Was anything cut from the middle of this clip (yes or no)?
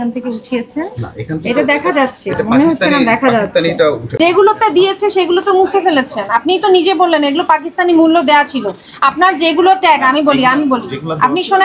yes